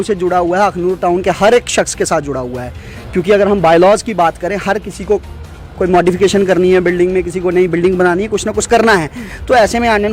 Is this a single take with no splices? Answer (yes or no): yes